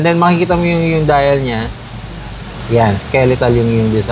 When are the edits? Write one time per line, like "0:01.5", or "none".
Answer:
none